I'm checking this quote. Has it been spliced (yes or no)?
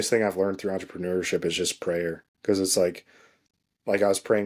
no